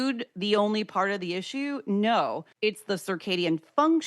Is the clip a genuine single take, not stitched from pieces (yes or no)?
no